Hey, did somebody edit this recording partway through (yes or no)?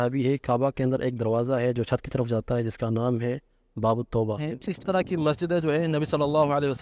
yes